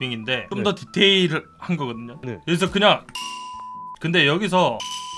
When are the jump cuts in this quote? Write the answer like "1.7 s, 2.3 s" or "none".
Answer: none

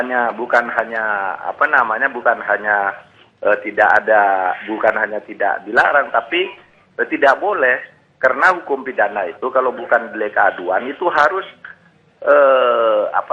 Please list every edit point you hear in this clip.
8.4 s

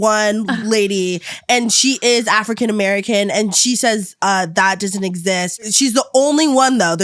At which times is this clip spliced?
5.7 s

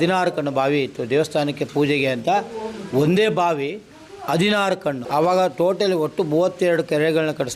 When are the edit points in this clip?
5.0 s

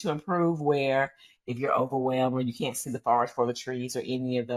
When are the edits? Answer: none

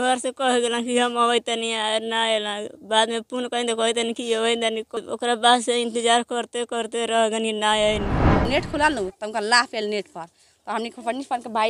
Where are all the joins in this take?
5.0 s, 8.4 s

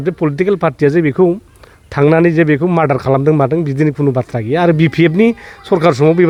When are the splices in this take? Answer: none

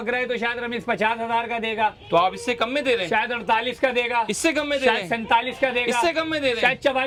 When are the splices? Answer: none

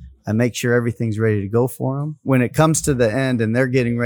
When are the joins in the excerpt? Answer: 2.2 s

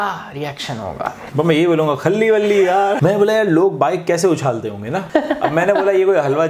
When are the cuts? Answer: 1.2 s, 3.0 s, 5.0 s

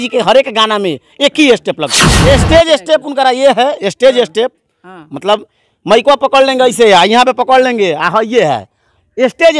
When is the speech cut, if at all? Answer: 2.1 s

